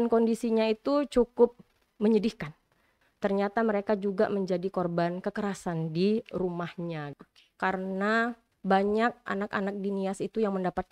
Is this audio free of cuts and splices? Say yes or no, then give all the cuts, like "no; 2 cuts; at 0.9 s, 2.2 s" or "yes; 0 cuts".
no; 2 cuts; at 3.0 s, 7.2 s